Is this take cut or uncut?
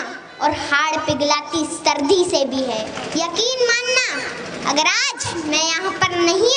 cut